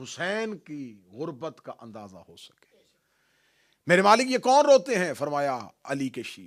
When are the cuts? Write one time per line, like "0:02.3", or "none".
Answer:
none